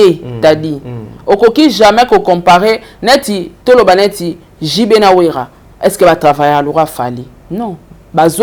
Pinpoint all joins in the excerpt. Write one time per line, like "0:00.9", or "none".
none